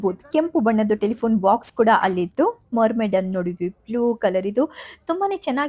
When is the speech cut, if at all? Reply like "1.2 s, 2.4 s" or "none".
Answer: 2.7 s